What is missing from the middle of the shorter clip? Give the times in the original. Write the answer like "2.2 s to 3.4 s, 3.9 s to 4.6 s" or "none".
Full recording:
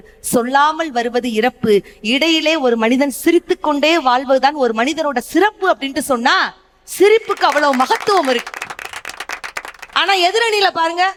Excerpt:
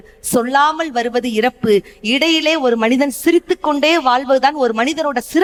none